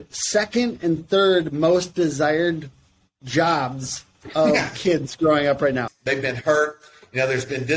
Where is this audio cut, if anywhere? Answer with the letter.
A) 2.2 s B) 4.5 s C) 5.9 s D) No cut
C